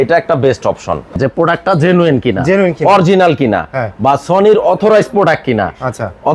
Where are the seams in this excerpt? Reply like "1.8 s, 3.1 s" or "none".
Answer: 1.1 s

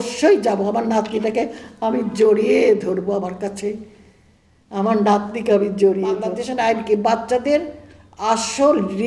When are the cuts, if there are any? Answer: 6.4 s

